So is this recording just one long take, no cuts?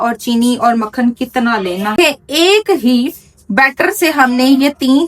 no; 1 cut; at 1.9 s

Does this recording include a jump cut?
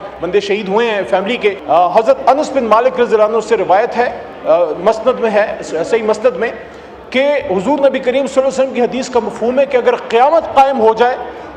yes; 1 cut; at 1.6 s

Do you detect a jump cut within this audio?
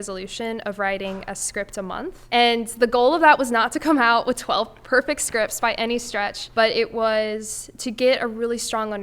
yes; 2 cuts; at 2.2 s, 6.4 s

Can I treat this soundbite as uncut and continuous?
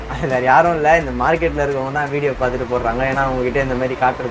yes; 0 cuts

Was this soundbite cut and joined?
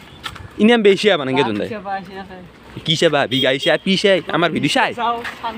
no; 0 cuts

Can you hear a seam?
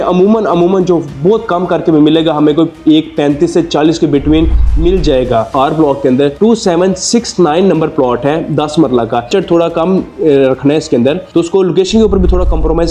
yes; 2 cuts; at 5.5 s, 9.3 s

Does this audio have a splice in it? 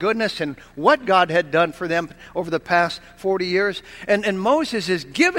no; 0 cuts

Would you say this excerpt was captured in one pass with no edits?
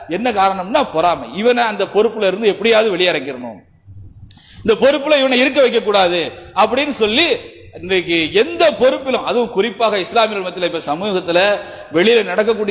yes; 0 cuts

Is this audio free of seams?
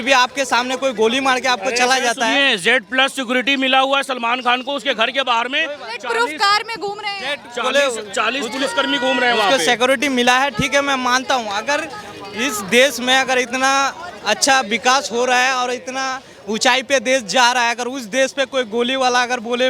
yes; 0 cuts

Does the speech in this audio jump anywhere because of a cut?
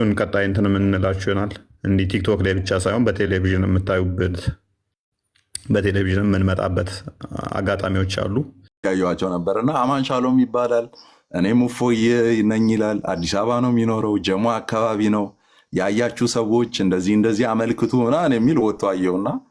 yes; 1 cut; at 8.8 s

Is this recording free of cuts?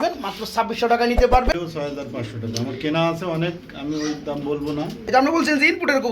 no; 2 cuts; at 1.5 s, 5.0 s

